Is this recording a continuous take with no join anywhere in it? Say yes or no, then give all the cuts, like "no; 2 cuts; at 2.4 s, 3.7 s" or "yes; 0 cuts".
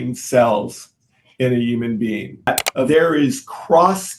no; 1 cut; at 2.7 s